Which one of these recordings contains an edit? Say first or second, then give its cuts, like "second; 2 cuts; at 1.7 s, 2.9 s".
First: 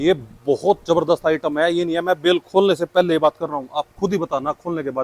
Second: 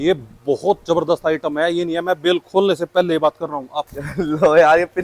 second; 1 cut; at 3.8 s